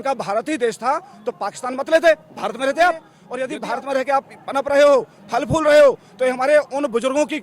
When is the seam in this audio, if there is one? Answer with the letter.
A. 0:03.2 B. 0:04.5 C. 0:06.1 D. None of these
A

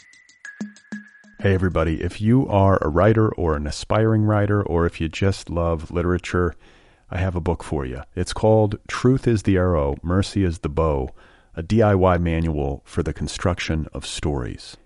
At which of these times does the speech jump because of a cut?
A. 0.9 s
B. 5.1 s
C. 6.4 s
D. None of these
A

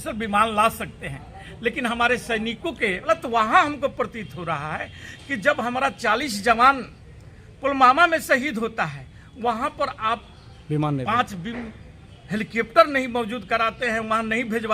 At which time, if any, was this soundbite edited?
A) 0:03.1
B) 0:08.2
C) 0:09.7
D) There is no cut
A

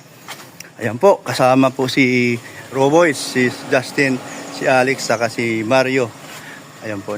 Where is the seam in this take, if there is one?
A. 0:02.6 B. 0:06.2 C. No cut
A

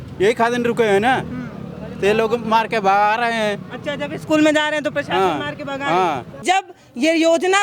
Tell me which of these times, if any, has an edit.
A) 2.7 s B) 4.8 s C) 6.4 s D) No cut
C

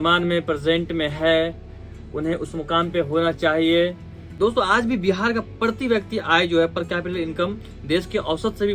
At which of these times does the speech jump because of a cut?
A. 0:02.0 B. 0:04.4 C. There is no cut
B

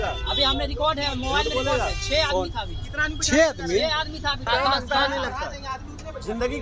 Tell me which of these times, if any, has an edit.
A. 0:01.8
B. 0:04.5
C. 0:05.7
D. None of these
D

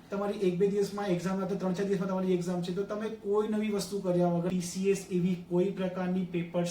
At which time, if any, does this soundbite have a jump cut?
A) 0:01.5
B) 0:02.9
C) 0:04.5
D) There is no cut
C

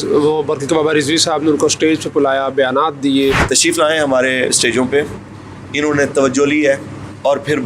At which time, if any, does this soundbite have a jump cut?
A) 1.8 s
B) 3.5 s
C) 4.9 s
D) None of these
B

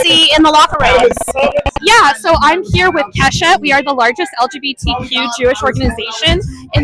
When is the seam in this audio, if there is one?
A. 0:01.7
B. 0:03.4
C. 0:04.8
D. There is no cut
A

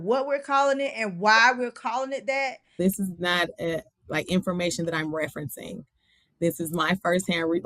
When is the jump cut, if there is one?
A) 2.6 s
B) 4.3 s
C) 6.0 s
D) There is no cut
A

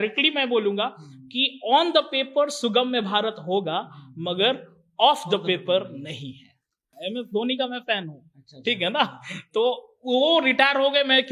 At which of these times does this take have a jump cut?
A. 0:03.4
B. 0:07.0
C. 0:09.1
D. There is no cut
B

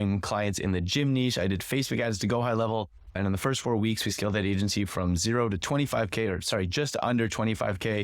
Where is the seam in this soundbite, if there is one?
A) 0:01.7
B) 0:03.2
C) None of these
B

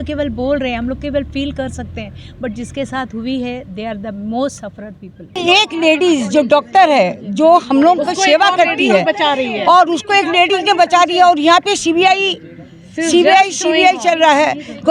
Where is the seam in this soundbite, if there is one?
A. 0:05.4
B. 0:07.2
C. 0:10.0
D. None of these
A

